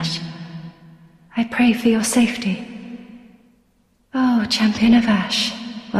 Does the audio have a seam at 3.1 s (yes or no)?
no